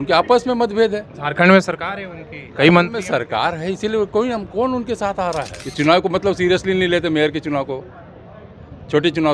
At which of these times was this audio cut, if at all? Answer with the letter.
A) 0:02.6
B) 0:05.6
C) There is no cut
B